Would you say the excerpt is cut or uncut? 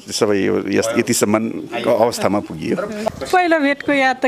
cut